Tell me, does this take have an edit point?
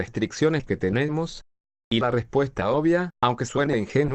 no; 0 cuts

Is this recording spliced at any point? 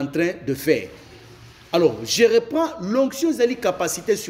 no; 0 cuts

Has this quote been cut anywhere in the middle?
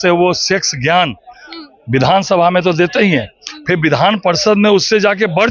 no; 0 cuts

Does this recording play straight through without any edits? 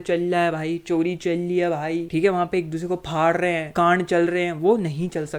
no; 2 cuts; at 2.1 s, 3.7 s

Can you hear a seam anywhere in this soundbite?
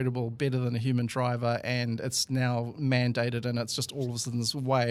no; 0 cuts

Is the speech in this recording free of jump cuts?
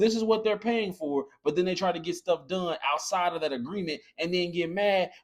yes; 0 cuts

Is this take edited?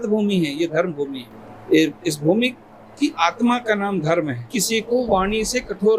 yes; 1 cut; at 4.6 s

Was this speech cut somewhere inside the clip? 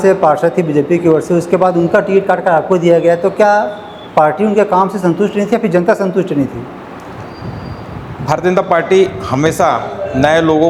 no; 0 cuts

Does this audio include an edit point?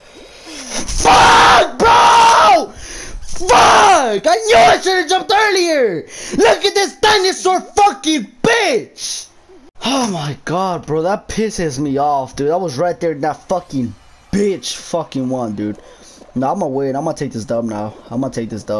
no; 0 cuts

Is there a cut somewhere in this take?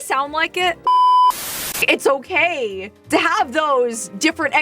yes; 2 cuts; at 0.8 s, 1.8 s

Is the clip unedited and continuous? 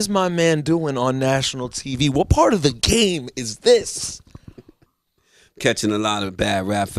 yes; 0 cuts

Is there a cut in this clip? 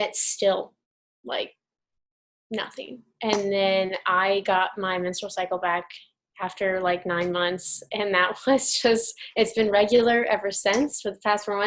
no; 0 cuts

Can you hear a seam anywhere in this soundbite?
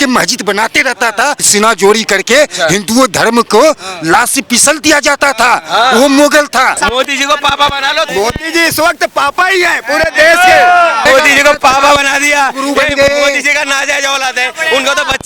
yes; 4 cuts; at 1.5 s, 6.8 s, 8.1 s, 11.0 s

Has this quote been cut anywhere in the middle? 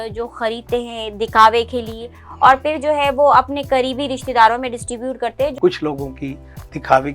yes; 1 cut; at 5.5 s

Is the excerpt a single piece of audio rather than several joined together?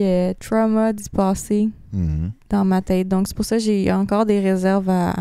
yes; 0 cuts

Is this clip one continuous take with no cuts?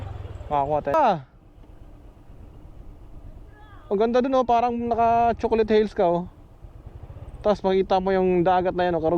no; 1 cut; at 0.9 s

